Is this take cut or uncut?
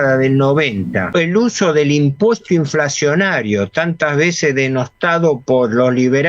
cut